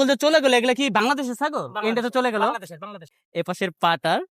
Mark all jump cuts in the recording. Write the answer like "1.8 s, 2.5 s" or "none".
3.1 s